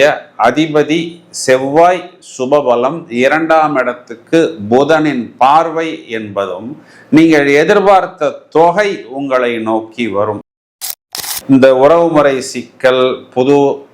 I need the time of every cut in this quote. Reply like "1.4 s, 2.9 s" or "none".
10.9 s